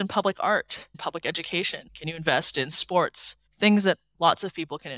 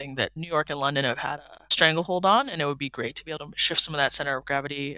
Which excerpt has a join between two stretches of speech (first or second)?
first